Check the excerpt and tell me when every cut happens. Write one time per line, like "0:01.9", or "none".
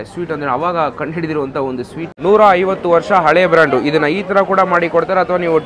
0:02.1